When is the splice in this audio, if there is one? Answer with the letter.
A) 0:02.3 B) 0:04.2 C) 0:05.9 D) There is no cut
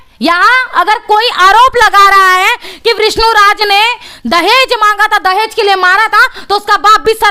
D